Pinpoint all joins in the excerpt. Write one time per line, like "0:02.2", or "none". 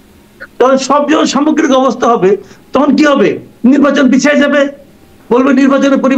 none